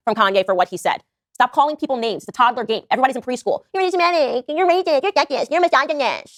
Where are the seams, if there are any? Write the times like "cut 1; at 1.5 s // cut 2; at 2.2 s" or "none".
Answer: none